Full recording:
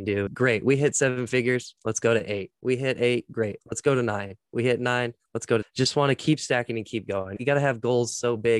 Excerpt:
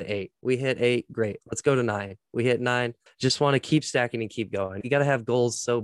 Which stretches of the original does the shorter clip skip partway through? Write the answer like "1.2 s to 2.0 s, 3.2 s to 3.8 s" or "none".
5.3 s to 5.7 s